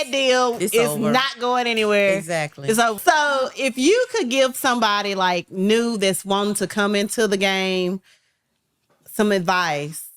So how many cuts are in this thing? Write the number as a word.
one